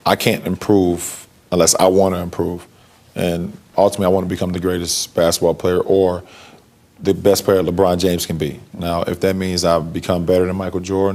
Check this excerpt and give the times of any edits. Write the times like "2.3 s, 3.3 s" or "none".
none